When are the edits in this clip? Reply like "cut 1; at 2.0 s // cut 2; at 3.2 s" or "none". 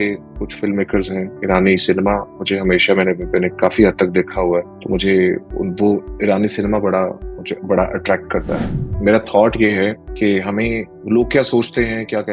cut 1; at 4.8 s // cut 2; at 8.7 s // cut 3; at 10.1 s // cut 4; at 10.9 s